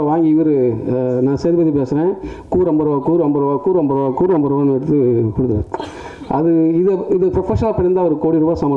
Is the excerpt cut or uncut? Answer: uncut